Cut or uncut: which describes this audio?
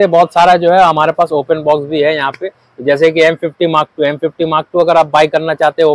uncut